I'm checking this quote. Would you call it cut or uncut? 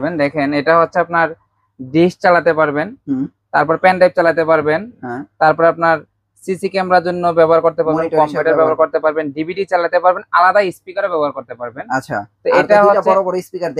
uncut